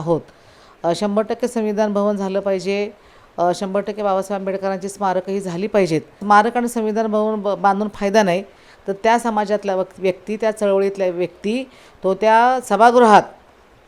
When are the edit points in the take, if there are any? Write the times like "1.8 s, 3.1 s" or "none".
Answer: 6.2 s